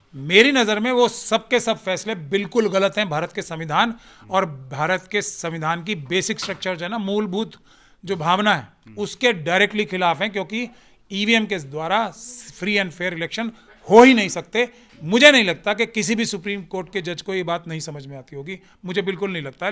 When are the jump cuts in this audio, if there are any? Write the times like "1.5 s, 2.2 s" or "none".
none